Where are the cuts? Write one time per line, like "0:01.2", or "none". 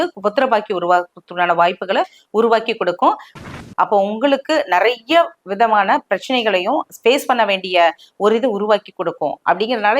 0:03.3